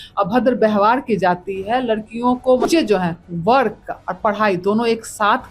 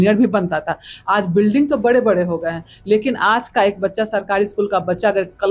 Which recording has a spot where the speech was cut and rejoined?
first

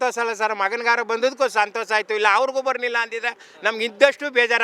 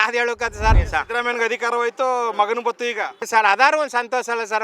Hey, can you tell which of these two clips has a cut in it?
second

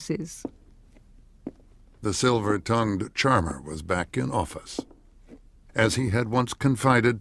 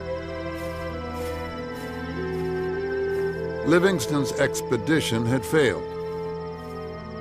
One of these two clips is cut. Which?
second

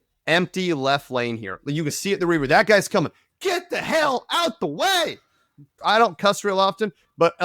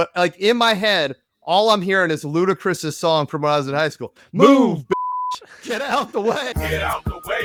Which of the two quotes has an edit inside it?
first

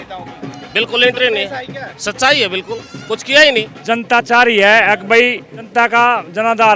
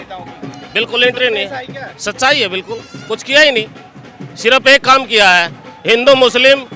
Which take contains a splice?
first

